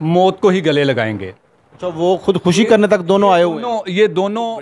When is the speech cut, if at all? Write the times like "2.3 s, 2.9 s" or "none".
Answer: none